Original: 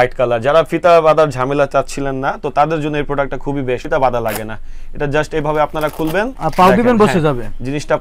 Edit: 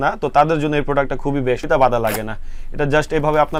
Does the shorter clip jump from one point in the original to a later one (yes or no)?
no